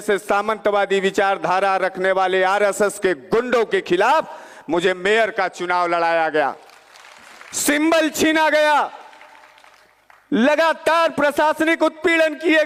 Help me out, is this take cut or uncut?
uncut